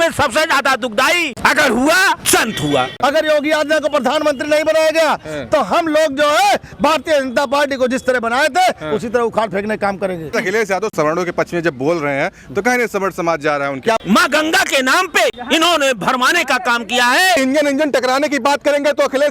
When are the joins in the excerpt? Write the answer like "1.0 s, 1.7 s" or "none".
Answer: 1.3 s, 2.7 s, 10.4 s, 14.0 s, 15.4 s, 17.4 s